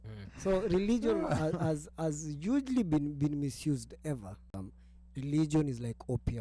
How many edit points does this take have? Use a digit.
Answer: 1